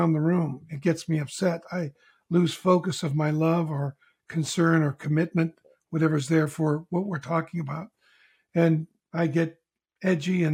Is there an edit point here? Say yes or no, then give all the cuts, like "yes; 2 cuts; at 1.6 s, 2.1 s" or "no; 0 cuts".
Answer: no; 0 cuts